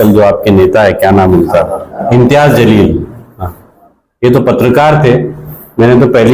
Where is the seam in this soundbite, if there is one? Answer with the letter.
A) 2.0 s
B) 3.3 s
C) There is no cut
A